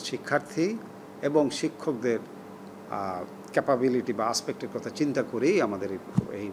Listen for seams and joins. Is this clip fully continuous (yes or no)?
yes